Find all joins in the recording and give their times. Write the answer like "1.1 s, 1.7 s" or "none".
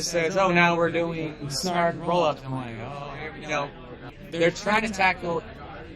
4.0 s